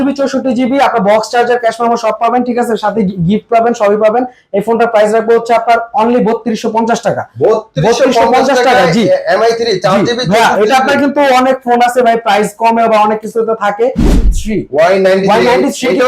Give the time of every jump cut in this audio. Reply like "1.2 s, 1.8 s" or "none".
14.2 s